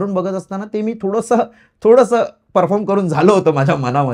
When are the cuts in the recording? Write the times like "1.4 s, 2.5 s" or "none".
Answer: none